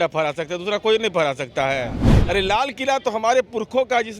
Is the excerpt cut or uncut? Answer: cut